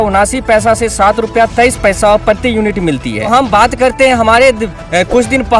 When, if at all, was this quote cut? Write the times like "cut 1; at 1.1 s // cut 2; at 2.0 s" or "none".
cut 1; at 3.3 s